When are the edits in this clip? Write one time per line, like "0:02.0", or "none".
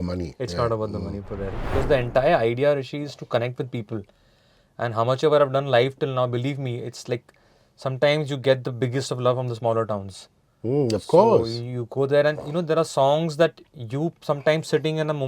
0:01.6